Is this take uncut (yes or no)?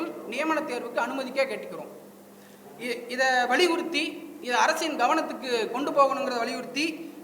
yes